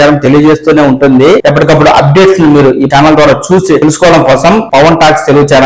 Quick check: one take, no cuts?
no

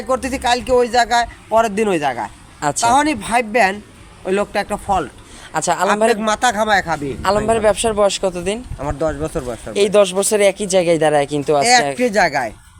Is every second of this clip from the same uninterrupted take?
yes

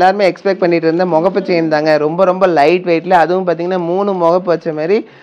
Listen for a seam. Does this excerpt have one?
no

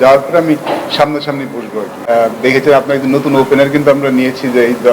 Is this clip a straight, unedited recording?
no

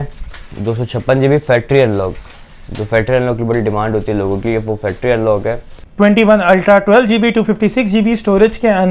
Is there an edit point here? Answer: yes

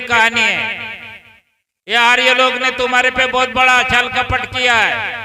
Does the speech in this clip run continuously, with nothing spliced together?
yes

